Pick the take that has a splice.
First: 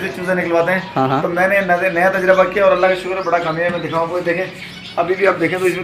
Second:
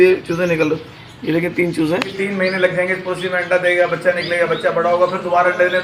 second; 1 cut; at 2.1 s

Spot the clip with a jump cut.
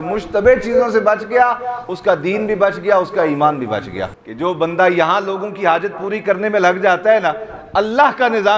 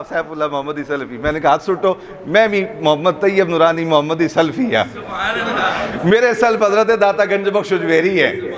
first; 1 cut; at 4.0 s

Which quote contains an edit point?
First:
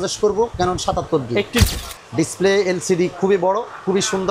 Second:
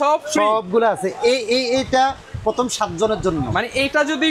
first; 1 cut; at 1.6 s

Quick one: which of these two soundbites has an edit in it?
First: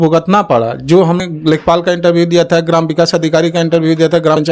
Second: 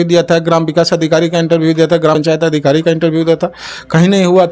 first; 1 cut; at 1.2 s

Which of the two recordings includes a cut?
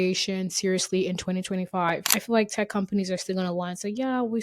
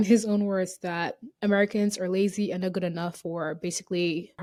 first; 1 cut; at 2.1 s

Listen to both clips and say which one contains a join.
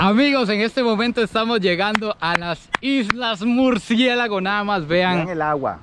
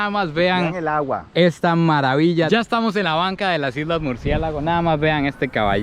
second; 1 cut; at 2.5 s

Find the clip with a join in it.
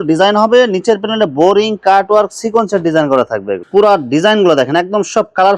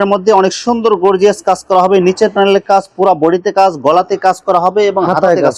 first; 1 cut; at 3.6 s

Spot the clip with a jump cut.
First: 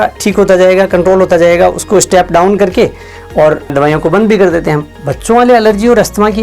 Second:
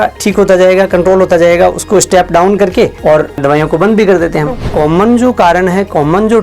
second; 2 cuts; at 3.0 s, 4.6 s

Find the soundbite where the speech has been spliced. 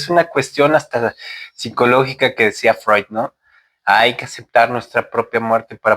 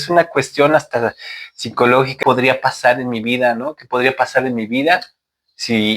second; 1 cut; at 2.1 s

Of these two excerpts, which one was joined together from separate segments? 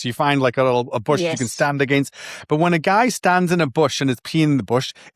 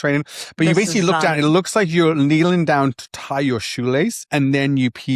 second; 1 cut; at 4.2 s

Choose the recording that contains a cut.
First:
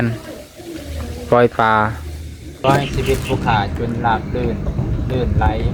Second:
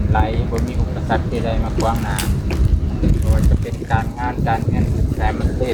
first; 1 cut; at 2.6 s

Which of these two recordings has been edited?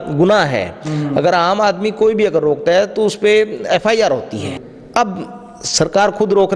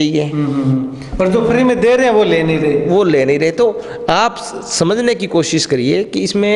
first; 1 cut; at 4.5 s

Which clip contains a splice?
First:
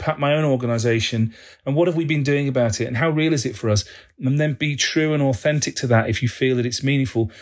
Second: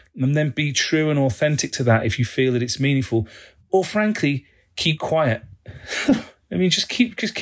second; 1 cut; at 6.3 s

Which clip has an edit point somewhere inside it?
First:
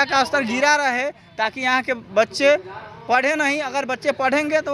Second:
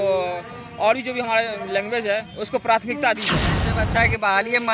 second; 1 cut; at 3.6 s

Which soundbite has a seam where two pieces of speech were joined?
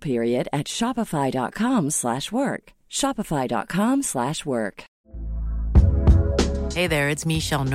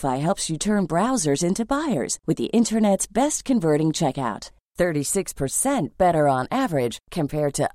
first; 1 cut; at 5.0 s

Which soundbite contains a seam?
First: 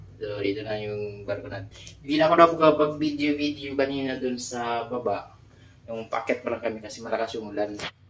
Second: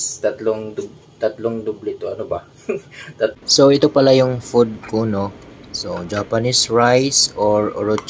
second; 1 cut; at 3.3 s

